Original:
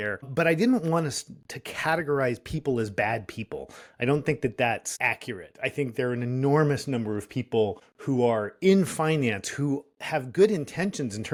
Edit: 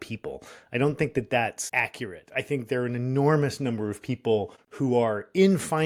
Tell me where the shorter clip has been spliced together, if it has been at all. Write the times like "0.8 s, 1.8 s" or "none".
none